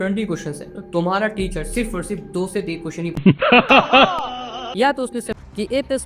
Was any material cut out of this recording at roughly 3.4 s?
yes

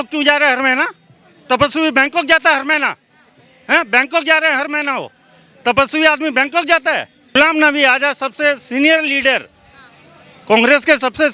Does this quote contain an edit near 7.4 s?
yes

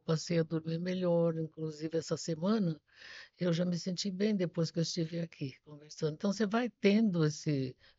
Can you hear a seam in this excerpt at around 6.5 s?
no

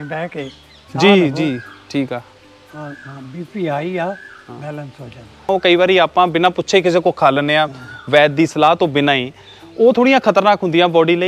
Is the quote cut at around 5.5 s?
yes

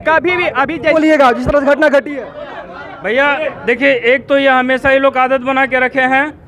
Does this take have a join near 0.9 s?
yes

